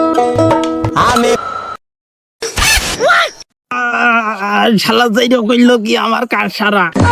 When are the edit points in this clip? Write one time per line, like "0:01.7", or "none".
0:01.4